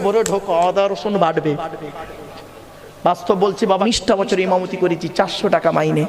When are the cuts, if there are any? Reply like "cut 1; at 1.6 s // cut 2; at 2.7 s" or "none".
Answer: cut 1; at 3.8 s